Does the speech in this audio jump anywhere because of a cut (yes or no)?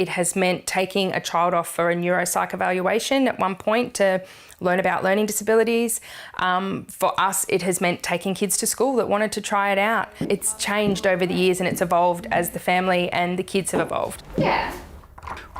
no